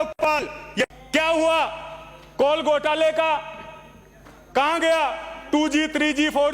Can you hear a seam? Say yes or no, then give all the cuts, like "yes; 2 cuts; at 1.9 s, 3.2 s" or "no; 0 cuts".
yes; 1 cut; at 0.9 s